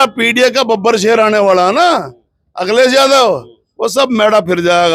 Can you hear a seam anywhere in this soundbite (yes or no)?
no